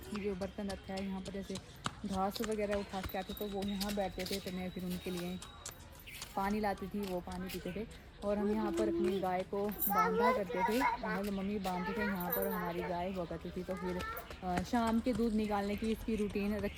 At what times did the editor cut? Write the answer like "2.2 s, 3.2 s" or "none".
none